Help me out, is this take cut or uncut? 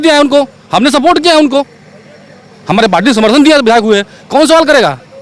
uncut